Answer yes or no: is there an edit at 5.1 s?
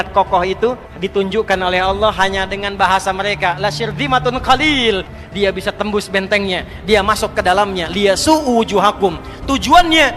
yes